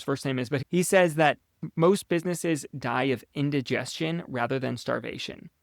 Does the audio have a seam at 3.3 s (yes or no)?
no